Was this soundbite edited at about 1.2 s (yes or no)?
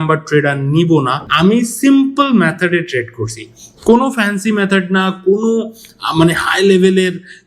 yes